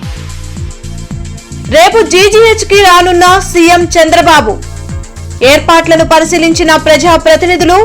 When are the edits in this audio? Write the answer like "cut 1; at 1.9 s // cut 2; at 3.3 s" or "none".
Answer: none